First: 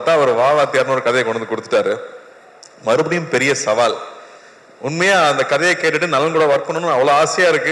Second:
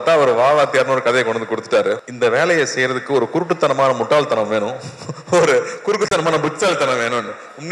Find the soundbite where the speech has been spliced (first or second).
second